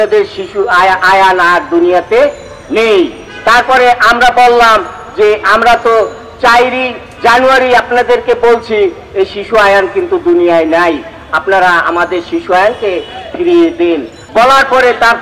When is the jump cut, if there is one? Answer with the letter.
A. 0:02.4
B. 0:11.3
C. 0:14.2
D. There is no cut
C